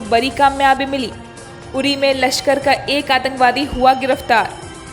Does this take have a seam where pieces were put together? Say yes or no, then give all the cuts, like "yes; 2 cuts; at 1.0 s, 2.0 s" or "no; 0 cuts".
no; 0 cuts